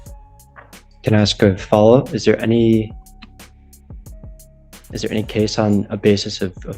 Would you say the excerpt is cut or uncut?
cut